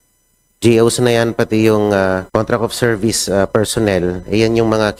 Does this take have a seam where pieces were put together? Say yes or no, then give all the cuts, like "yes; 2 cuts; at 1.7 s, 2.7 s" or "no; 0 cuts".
yes; 1 cut; at 2.3 s